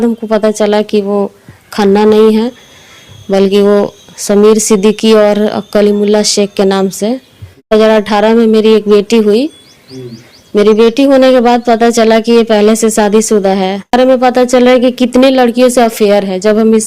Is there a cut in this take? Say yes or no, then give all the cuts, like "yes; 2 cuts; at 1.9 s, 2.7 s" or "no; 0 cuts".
yes; 2 cuts; at 7.7 s, 13.9 s